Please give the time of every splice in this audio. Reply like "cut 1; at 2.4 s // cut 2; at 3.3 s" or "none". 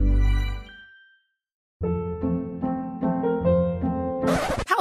cut 1; at 1.6 s